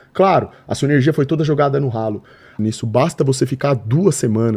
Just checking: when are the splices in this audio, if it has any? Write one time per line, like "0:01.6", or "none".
0:02.5